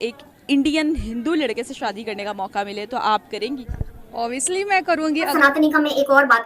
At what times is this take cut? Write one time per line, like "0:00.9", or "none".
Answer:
0:05.3